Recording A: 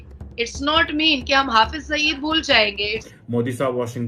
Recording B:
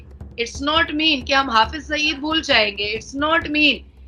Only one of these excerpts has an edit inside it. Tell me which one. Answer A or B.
A